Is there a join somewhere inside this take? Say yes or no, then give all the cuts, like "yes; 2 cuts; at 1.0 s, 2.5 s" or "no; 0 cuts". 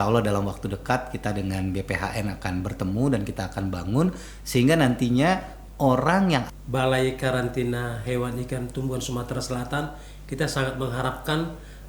yes; 1 cut; at 6.6 s